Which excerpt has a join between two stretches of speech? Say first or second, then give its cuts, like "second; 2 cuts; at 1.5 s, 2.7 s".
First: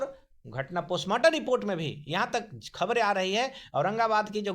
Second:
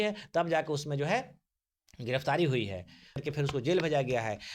second; 1 cut; at 3.2 s